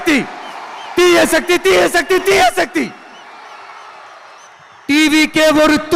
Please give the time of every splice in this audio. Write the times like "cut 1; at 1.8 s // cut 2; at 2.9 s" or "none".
cut 1; at 4.5 s